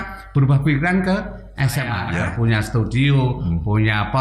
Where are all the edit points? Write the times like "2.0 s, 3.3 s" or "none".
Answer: 2.0 s